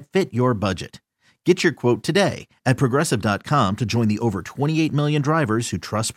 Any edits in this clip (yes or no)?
no